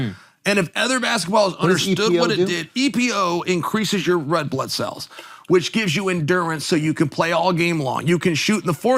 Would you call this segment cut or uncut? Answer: uncut